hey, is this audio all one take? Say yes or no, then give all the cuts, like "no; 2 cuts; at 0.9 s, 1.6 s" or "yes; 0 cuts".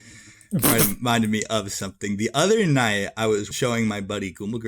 no; 1 cut; at 3.5 s